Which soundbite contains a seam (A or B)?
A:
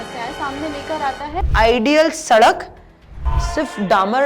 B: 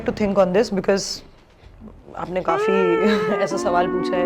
A